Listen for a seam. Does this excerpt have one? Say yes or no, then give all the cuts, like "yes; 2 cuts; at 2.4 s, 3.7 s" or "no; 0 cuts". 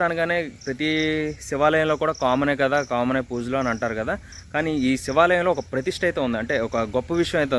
no; 0 cuts